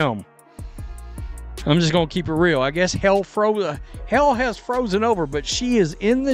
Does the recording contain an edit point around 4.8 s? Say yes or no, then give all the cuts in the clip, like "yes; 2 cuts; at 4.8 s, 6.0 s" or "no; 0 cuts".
no; 0 cuts